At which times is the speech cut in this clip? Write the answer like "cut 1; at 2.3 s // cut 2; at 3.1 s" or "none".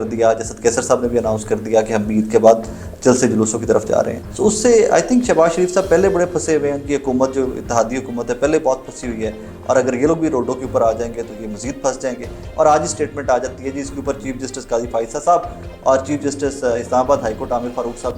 cut 1; at 4.2 s // cut 2; at 12.4 s